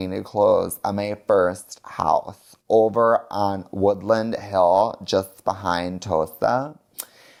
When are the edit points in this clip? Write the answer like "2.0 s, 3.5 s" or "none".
none

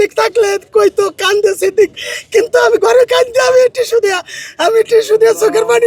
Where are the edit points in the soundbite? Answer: none

